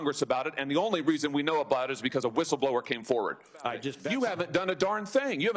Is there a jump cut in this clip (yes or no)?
yes